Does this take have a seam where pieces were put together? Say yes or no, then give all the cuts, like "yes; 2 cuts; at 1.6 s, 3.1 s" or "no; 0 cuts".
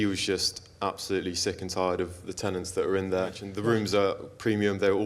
yes; 1 cut; at 3.5 s